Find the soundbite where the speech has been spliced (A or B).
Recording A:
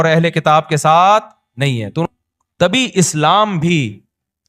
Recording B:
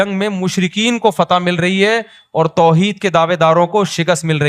A